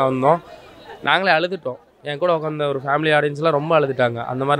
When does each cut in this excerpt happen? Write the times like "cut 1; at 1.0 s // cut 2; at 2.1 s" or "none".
none